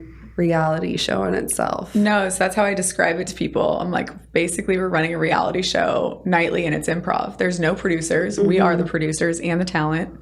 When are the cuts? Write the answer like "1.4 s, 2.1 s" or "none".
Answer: none